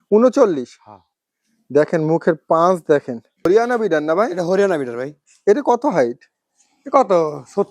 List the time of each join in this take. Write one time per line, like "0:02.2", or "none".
0:03.5